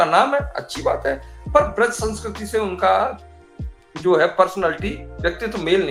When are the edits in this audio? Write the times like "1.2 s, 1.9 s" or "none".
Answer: none